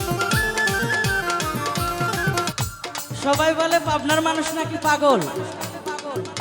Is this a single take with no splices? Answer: no; 1 cut; at 2.5 s

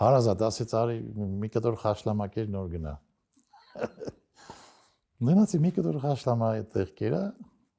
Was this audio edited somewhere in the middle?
no; 0 cuts

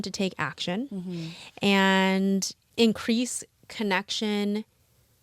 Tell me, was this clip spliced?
yes; 1 cut; at 2.6 s

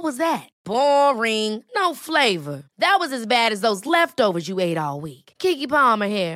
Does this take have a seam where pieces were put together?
no; 0 cuts

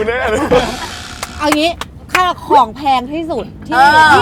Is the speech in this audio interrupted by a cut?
no; 0 cuts

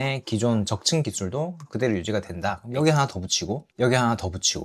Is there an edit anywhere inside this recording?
yes; 1 cut; at 2.6 s

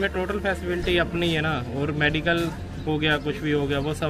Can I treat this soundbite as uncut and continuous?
yes; 0 cuts

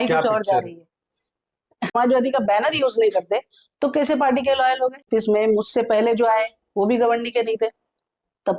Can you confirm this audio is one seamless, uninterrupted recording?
no; 2 cuts; at 2.0 s, 5.0 s

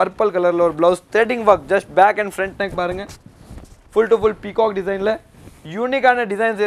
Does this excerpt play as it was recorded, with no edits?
yes; 0 cuts

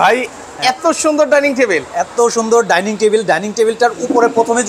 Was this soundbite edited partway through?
no; 0 cuts

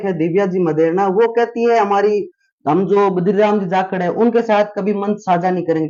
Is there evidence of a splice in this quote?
no; 0 cuts

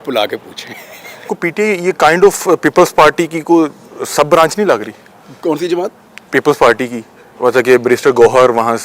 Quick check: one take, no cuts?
no; 1 cut; at 1.3 s

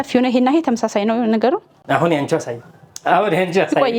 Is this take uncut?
no; 1 cut; at 1.8 s

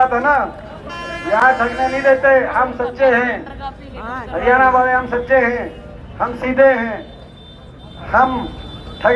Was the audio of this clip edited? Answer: no; 0 cuts

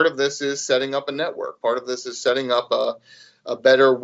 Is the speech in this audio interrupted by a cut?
no; 0 cuts

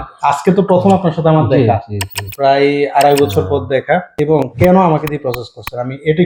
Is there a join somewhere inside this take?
no; 0 cuts

